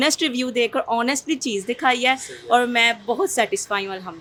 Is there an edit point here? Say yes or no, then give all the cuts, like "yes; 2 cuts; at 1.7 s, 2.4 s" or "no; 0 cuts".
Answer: no; 0 cuts